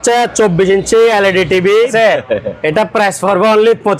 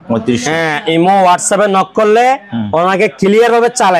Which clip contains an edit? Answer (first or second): first